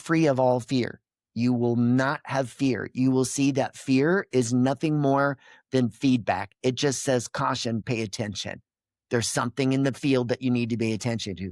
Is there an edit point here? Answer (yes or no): yes